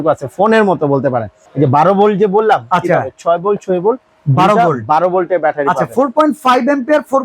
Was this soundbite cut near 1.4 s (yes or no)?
yes